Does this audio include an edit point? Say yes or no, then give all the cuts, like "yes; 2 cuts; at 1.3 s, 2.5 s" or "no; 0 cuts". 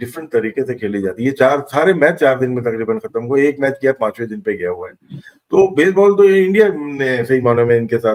no; 0 cuts